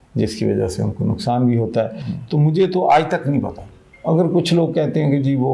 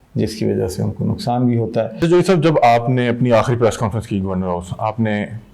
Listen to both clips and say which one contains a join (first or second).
second